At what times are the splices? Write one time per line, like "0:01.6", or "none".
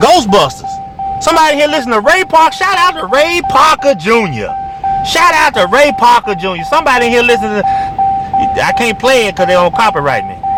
none